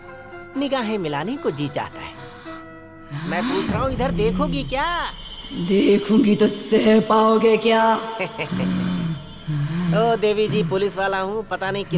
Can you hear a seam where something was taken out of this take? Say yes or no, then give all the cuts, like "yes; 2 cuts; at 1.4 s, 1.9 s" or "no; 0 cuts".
no; 0 cuts